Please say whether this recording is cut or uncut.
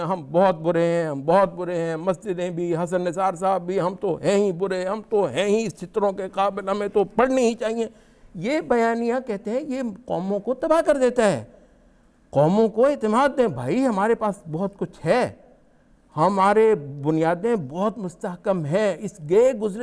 uncut